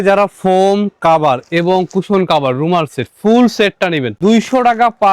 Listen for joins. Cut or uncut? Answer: cut